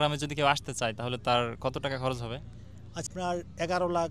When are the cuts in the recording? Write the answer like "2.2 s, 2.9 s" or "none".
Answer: 3.1 s